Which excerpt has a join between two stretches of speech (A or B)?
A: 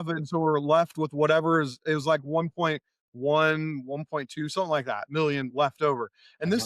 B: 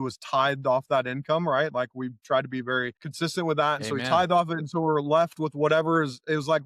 B